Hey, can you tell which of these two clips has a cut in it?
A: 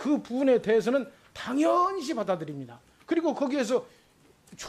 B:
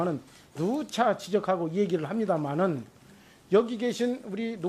A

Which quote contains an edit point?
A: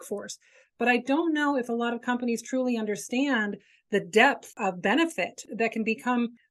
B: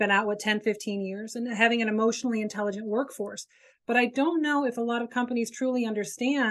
A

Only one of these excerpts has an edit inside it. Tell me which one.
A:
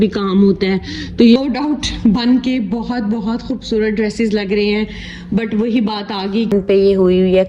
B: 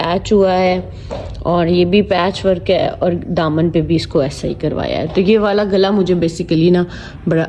A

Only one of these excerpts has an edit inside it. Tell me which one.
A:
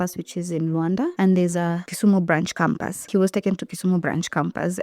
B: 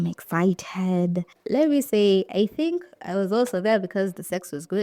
A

